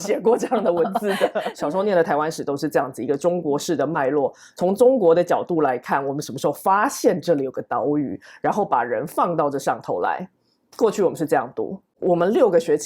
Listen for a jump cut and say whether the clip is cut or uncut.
cut